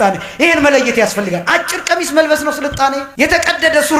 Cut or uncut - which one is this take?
cut